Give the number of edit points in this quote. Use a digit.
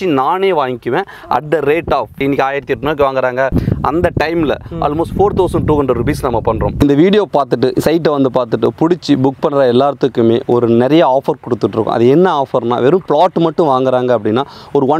3